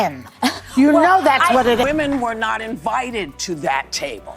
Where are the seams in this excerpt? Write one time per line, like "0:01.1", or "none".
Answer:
0:01.8